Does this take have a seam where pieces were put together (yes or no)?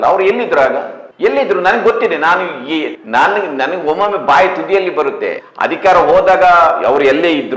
yes